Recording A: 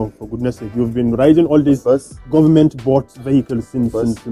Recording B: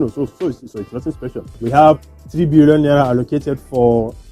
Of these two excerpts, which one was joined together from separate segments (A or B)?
B